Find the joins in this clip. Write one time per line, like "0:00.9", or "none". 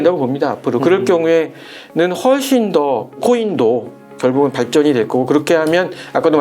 0:03.2